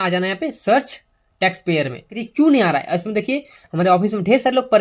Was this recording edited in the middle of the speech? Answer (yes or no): yes